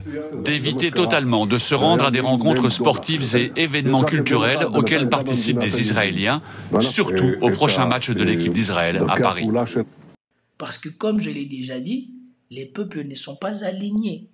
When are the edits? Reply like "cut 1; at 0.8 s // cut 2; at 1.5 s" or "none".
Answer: cut 1; at 10.0 s